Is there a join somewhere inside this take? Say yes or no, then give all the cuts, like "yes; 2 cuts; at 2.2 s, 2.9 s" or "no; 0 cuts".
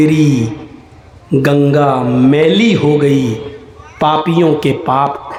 no; 0 cuts